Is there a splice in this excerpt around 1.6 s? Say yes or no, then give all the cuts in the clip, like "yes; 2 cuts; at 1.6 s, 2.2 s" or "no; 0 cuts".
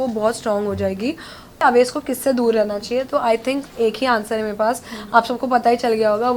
yes; 1 cut; at 1.6 s